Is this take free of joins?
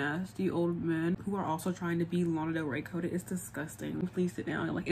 no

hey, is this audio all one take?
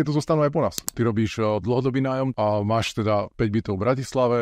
no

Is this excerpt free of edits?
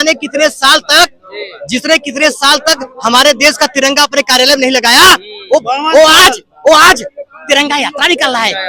yes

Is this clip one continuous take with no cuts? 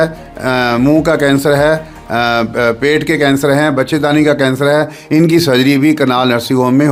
yes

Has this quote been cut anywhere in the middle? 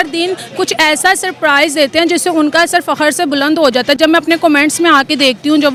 no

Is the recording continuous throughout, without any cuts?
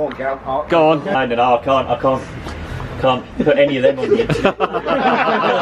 no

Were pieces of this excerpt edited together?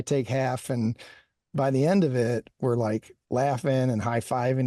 no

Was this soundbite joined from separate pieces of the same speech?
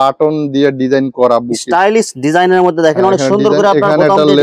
no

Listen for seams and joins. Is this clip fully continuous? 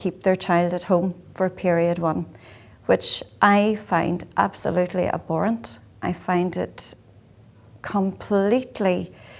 yes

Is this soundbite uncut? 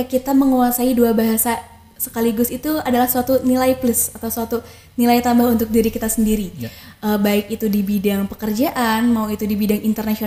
yes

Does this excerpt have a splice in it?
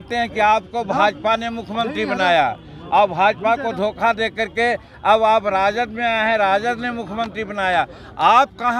no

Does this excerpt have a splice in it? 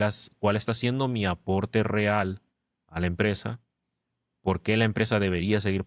no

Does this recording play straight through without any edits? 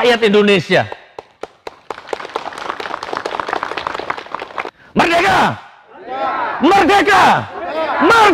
no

